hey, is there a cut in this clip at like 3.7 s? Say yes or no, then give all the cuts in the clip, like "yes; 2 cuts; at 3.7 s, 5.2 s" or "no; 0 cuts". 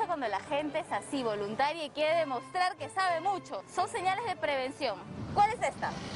yes; 2 cuts; at 3.7 s, 5.2 s